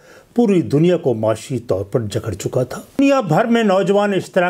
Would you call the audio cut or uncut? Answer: cut